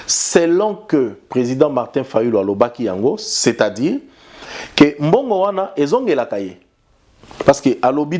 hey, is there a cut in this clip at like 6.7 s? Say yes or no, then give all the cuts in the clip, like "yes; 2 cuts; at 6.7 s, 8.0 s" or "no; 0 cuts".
no; 0 cuts